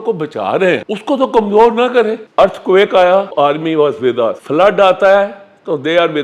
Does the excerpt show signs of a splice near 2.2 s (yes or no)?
yes